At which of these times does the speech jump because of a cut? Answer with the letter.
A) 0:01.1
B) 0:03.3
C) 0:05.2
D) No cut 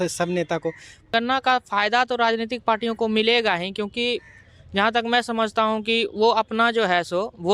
A